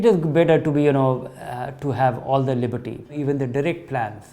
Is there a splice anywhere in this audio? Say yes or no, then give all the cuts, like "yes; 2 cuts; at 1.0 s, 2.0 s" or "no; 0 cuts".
yes; 1 cut; at 3.1 s